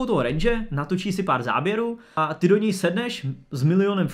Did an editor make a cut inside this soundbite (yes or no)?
no